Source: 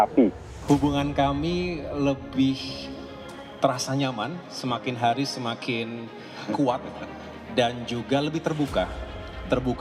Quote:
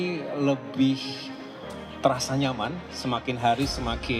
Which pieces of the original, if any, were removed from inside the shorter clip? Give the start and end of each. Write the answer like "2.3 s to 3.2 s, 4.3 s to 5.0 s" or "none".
none